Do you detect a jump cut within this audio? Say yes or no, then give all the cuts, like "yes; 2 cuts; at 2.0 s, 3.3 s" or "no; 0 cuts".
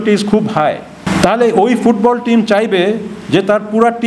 yes; 1 cut; at 1.0 s